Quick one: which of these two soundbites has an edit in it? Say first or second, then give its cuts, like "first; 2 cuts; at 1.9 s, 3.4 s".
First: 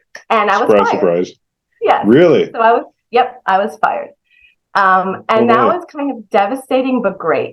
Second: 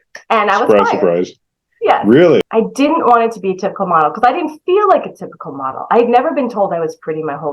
second; 1 cut; at 2.5 s